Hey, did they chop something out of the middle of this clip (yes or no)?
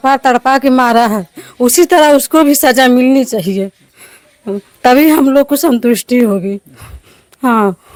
no